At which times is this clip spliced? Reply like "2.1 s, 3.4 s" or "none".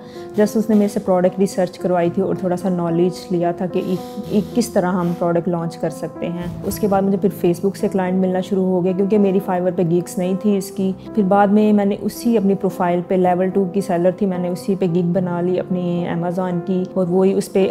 11.0 s, 16.9 s

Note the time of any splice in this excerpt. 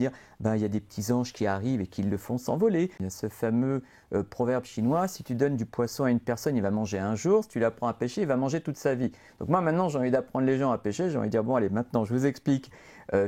3.1 s

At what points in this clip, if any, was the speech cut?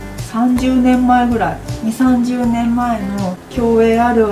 1.7 s, 3.4 s

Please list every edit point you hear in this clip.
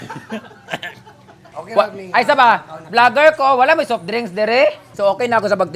1.4 s, 4.9 s

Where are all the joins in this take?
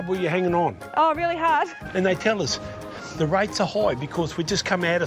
1.8 s

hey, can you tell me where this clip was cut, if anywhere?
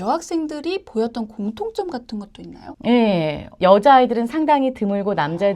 3.6 s

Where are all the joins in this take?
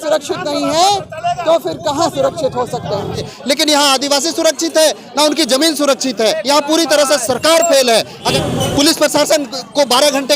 3.3 s, 6.4 s, 8.3 s

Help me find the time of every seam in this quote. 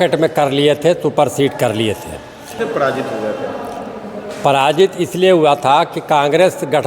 2.6 s

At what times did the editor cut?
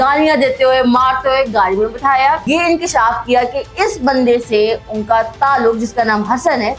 2.4 s

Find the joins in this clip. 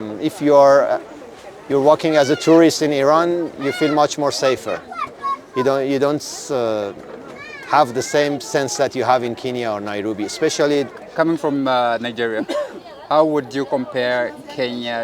11.0 s

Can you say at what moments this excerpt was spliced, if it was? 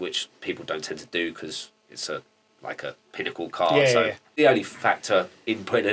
4.3 s

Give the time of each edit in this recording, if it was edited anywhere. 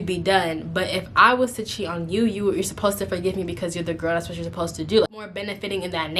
5.3 s

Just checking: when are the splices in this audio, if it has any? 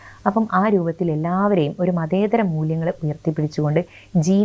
none

